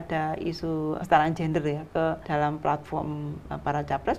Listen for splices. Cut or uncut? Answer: cut